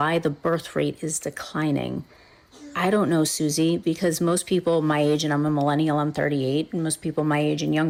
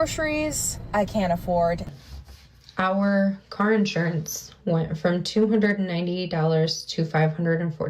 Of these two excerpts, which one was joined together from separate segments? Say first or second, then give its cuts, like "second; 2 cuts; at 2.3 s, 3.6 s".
second; 1 cut; at 1.9 s